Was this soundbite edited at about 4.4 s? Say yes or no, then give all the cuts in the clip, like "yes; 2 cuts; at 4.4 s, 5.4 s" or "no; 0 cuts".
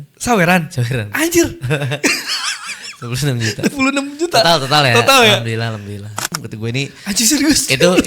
no; 1 cut; at 6.2 s